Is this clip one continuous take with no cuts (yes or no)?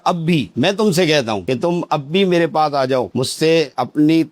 yes